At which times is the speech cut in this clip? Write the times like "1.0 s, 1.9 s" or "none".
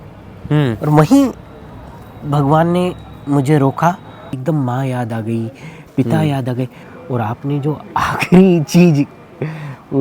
4.4 s, 6.8 s